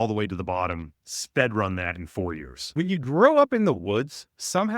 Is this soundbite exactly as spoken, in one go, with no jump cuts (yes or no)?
no